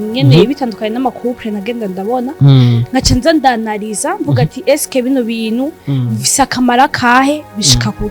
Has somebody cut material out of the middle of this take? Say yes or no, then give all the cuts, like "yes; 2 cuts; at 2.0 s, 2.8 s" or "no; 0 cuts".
no; 0 cuts